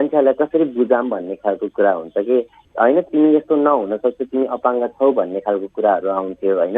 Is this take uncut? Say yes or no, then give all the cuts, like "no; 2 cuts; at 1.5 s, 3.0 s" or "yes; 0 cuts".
no; 1 cut; at 2.9 s